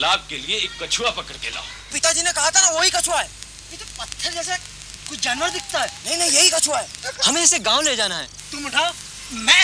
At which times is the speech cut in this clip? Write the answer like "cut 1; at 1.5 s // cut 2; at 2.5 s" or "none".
cut 1; at 1.9 s // cut 2; at 8.4 s